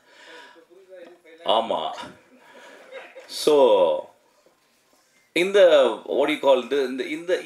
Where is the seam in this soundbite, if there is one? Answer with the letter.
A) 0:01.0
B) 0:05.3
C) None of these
C